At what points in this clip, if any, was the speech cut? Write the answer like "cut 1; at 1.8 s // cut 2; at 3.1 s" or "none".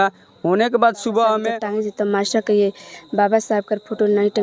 cut 1; at 1.5 s